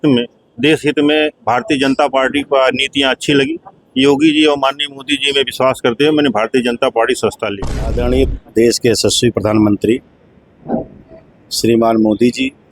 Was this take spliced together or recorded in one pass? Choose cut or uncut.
cut